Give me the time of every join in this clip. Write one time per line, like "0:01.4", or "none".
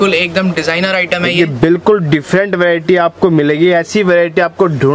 none